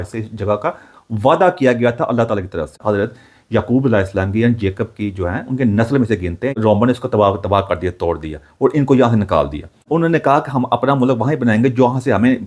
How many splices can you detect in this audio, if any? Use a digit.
3